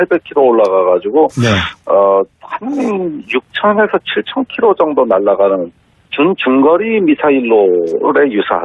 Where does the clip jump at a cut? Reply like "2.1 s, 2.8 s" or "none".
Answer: 6.4 s

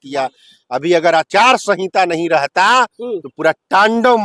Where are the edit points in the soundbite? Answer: none

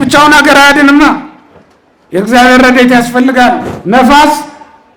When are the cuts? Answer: 3.7 s

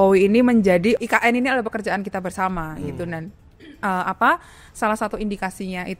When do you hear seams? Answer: none

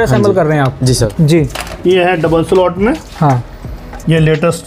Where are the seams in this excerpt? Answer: 1.1 s

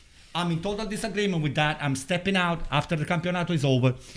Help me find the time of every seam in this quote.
none

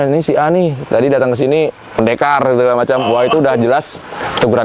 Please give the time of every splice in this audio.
none

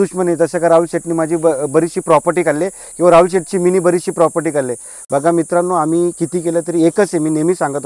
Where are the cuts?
none

